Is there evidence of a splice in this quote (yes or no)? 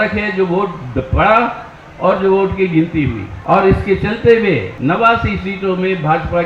yes